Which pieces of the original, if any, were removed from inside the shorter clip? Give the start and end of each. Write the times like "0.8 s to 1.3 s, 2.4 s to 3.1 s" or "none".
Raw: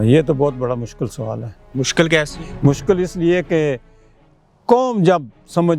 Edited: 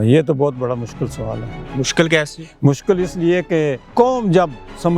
3.8 s to 4.5 s